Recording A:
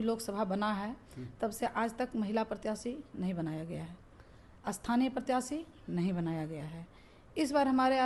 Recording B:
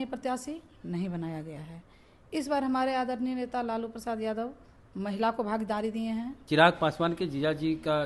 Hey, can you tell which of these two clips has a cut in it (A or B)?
B